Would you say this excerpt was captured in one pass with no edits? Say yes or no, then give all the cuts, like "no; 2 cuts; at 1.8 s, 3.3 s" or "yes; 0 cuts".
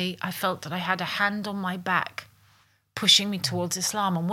yes; 0 cuts